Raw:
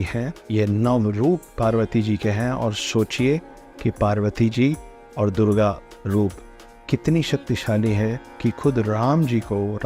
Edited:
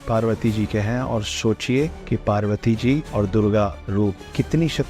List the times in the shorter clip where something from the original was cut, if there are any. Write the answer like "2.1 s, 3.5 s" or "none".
2.0 s, 3.1 s, 3.9 s